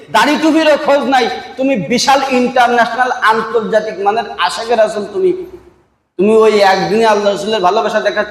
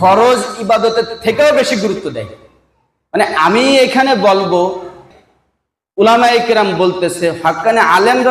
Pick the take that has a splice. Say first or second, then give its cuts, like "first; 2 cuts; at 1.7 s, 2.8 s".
second; 1 cut; at 5.0 s